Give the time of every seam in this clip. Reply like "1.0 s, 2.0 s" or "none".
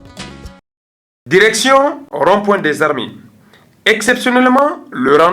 0.9 s